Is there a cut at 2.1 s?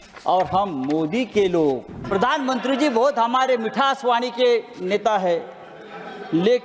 yes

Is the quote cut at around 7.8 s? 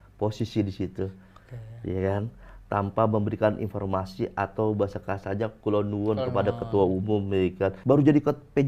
yes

